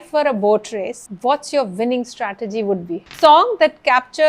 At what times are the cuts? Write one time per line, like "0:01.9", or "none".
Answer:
0:01.0
0:03.1

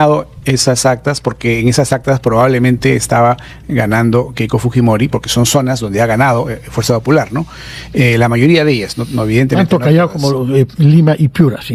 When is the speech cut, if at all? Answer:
none

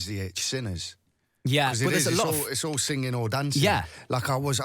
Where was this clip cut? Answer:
none

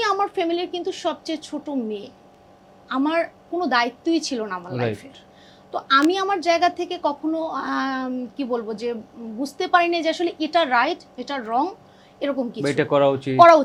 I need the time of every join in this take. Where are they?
none

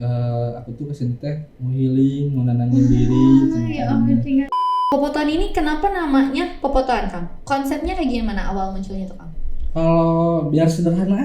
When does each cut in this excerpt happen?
0:04.5

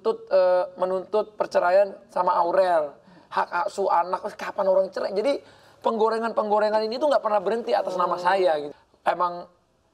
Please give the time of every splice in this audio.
0:08.7

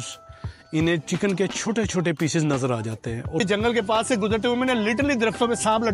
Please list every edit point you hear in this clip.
0:03.4

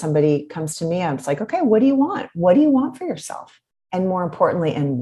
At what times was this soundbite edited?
none

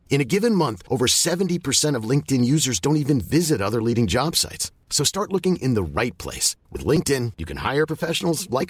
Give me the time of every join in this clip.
none

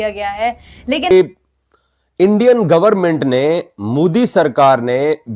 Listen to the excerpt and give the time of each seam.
0:01.1

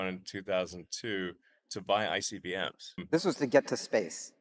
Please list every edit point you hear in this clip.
0:02.9

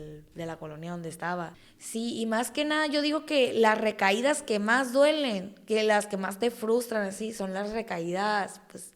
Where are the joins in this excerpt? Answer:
0:01.6

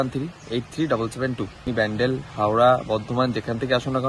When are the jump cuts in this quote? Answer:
0:01.7

